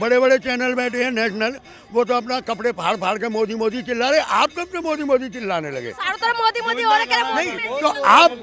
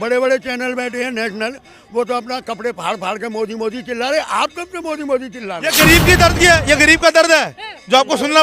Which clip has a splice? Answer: second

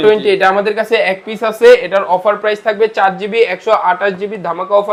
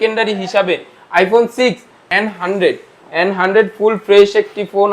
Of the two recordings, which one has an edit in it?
second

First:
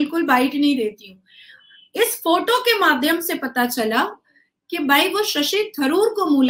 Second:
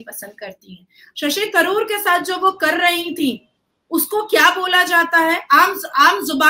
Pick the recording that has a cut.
second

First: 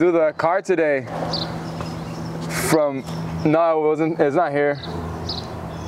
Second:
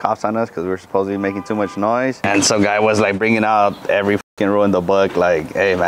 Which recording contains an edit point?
second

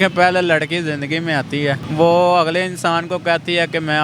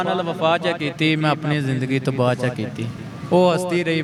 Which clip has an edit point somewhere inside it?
first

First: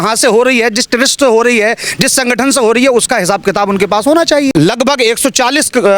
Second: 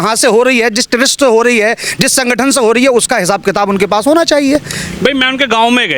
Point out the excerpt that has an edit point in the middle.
first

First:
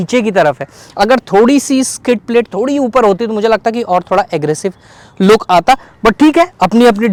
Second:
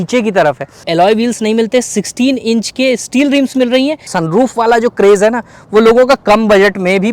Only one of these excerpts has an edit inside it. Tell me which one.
second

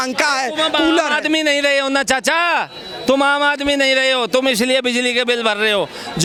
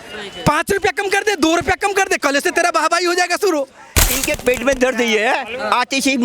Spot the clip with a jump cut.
second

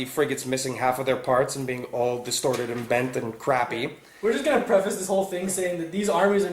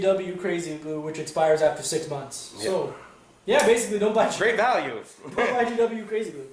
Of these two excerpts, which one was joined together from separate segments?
first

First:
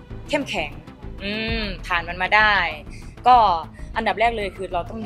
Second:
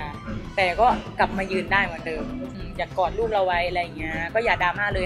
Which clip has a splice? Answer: second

